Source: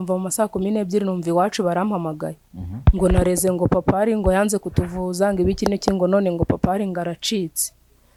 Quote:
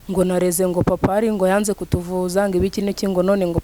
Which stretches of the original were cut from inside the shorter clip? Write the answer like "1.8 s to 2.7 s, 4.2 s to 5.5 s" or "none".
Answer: none